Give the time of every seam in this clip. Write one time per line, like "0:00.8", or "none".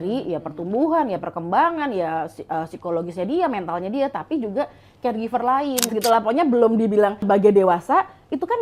0:05.9
0:07.2